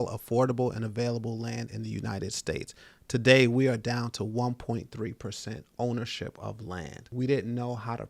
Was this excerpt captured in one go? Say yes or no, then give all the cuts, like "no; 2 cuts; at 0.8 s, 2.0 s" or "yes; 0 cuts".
no; 1 cut; at 7.0 s